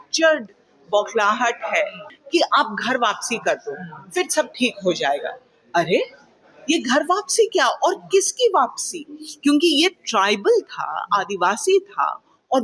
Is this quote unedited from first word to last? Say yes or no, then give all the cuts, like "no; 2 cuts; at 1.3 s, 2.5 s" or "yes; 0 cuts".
no; 1 cut; at 2.1 s